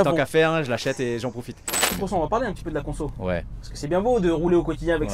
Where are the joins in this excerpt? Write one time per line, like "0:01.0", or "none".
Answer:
0:01.9